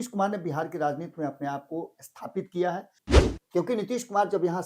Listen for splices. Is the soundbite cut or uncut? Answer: cut